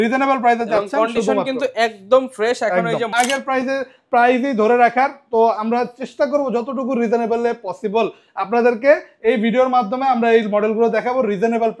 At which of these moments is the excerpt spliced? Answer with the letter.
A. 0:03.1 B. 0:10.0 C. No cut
A